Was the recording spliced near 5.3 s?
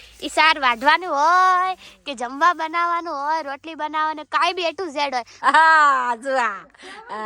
yes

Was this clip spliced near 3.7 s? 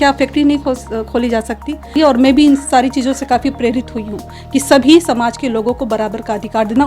no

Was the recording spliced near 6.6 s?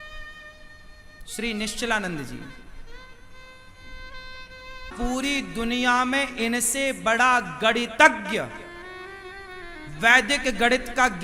no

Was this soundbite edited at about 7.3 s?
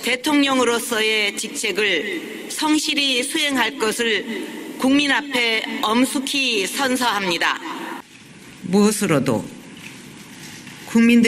yes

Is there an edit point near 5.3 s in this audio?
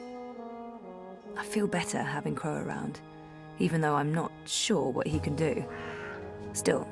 no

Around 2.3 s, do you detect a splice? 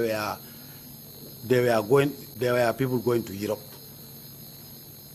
no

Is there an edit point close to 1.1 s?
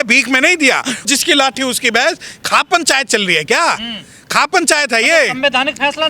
yes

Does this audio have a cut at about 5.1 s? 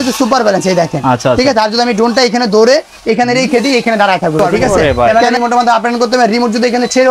yes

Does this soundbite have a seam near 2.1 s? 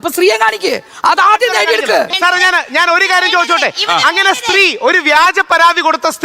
yes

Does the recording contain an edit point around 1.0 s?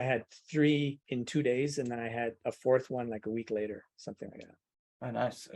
yes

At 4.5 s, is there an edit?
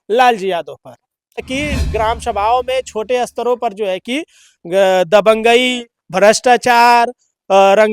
no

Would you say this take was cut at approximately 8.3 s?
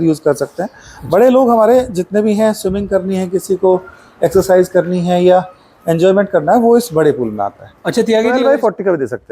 yes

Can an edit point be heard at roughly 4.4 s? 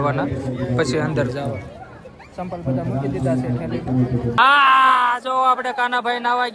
yes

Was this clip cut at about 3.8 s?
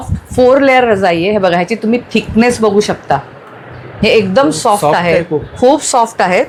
no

